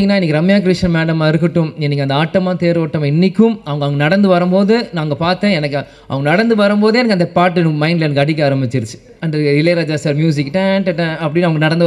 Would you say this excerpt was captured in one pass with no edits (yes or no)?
yes